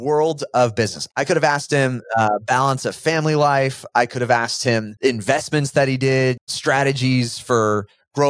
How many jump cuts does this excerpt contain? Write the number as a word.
two